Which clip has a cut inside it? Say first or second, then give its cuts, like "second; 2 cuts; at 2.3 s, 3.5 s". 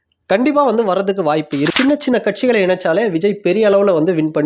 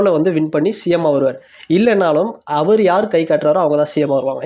first; 1 cut; at 1.7 s